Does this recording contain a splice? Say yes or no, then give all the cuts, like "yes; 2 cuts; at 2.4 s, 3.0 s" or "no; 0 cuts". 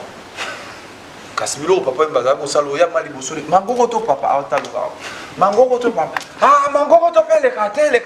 no; 0 cuts